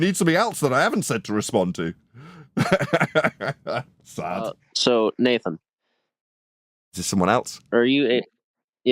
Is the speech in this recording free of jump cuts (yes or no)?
no